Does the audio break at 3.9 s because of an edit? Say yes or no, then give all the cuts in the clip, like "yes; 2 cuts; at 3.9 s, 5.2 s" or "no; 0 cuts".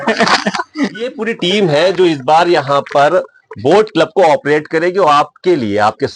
no; 1 cut; at 1.1 s